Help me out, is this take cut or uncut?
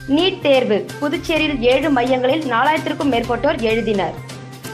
uncut